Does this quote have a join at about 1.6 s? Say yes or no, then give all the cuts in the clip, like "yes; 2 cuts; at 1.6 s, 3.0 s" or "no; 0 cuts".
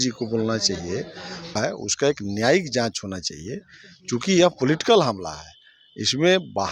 yes; 1 cut; at 1.6 s